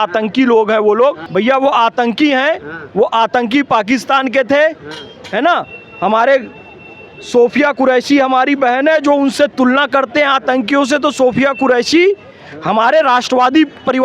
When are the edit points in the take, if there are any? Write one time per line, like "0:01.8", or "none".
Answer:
none